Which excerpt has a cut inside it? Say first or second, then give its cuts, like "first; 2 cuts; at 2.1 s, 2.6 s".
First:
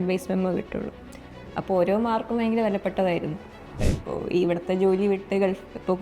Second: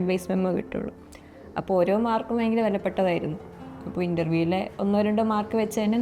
first; 1 cut; at 3.8 s